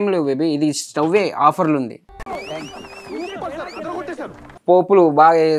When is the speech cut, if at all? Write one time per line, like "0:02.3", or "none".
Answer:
0:04.5